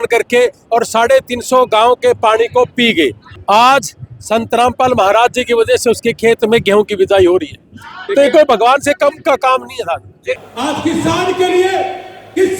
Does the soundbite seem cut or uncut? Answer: cut